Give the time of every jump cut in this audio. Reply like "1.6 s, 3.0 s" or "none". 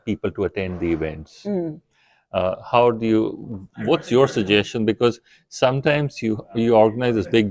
none